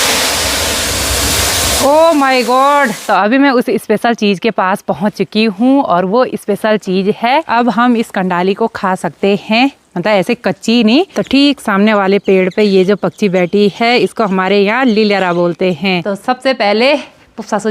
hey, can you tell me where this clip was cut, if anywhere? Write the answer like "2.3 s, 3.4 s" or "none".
3.0 s, 7.5 s, 11.1 s, 16.1 s